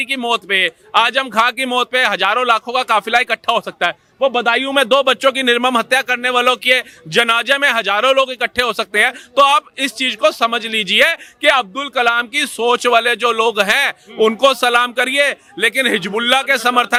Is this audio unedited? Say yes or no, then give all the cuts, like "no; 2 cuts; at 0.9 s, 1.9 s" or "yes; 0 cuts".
yes; 0 cuts